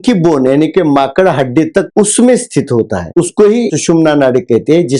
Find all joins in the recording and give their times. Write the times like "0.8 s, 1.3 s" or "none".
1.9 s, 3.7 s

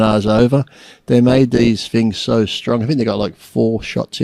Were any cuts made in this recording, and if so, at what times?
none

